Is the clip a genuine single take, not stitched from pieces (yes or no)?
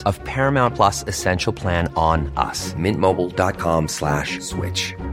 yes